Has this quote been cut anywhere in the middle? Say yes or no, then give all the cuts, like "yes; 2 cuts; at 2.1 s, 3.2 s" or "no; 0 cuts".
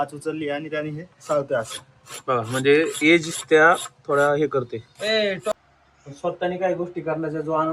yes; 1 cut; at 5.5 s